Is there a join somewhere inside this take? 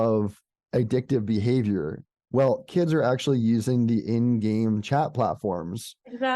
yes; 1 cut; at 2.1 s

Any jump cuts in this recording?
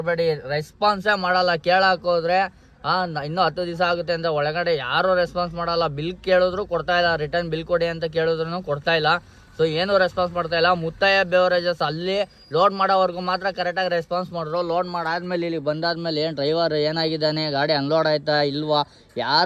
no; 0 cuts

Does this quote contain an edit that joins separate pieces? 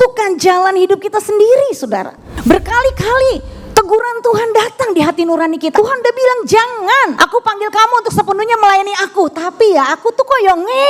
yes; 3 cuts; at 2.2 s, 5.7 s, 7.1 s

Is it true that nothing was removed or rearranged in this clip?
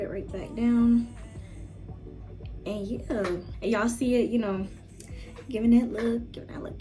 no; 1 cut; at 3.5 s

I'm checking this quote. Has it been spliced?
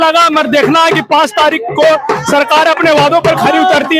no; 0 cuts

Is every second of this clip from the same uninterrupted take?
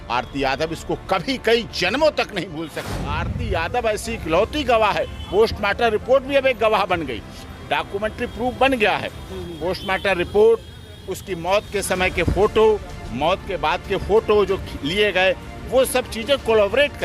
no; 1 cut; at 2.8 s

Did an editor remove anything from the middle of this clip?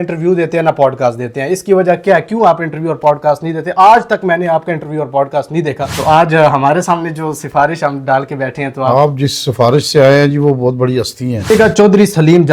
yes; 2 cuts; at 5.9 s, 11.5 s

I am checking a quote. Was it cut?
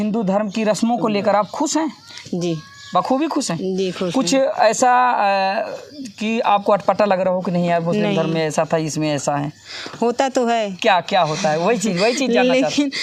no; 0 cuts

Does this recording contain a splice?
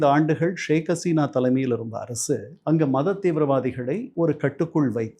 yes; 1 cut; at 4.1 s

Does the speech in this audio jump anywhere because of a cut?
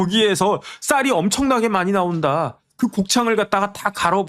no; 0 cuts

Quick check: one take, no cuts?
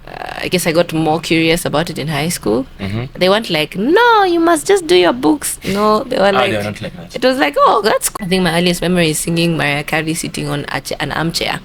no; 1 cut; at 8.1 s

